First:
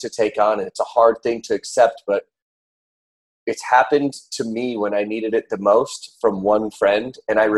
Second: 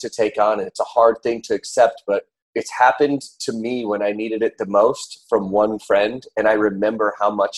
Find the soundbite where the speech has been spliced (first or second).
second